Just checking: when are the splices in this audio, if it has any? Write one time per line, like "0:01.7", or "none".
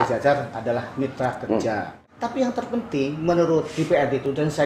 0:02.0